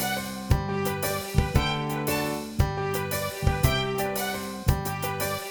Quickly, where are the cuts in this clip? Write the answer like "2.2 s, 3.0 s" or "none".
none